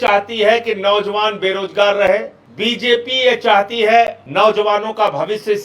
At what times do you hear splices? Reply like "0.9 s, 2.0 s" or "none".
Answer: 2.4 s, 4.2 s